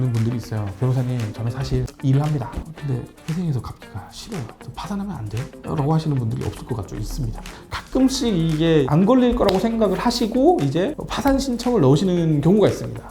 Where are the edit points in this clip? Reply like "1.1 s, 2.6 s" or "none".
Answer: 2.6 s, 7.6 s